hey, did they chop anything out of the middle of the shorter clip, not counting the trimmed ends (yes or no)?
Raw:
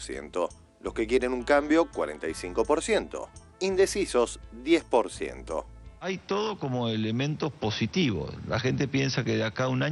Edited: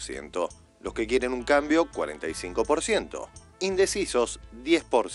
no